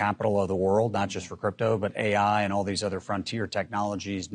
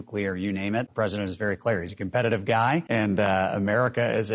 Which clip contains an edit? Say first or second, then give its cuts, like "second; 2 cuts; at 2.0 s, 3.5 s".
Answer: second; 2 cuts; at 0.9 s, 2.9 s